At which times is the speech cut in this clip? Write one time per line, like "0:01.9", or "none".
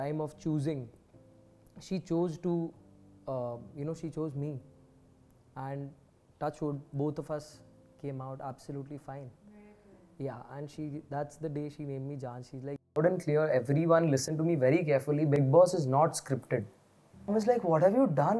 0:13.0
0:17.3